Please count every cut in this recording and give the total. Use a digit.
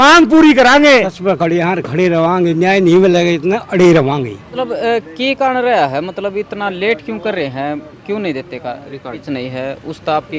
3